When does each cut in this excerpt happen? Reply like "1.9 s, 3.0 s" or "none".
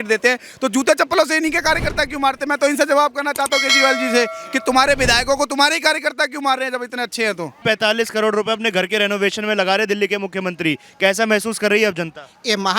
none